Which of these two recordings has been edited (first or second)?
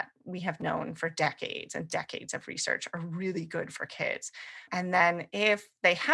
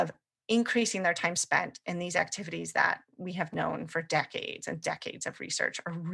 first